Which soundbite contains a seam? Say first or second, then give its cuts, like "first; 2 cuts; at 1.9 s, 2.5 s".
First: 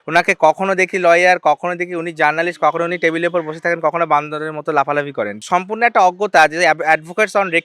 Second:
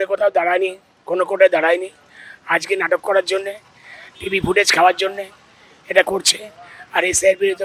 first; 1 cut; at 5.4 s